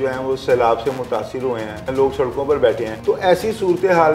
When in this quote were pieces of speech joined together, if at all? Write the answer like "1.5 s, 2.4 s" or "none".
1.9 s, 2.9 s